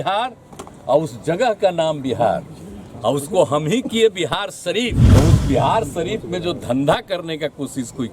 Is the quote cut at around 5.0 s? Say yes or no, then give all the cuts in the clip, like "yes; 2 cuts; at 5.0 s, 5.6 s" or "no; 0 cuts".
yes; 1 cut; at 5.0 s